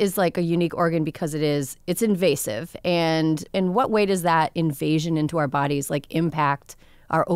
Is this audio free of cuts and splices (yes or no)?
yes